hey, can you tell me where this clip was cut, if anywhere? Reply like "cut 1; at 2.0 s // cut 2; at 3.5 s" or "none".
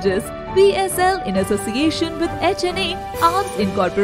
none